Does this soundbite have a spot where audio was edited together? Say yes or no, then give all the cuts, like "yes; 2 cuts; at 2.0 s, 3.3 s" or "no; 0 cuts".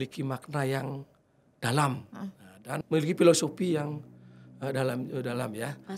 yes; 1 cut; at 2.8 s